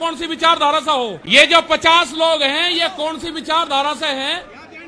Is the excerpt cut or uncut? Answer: cut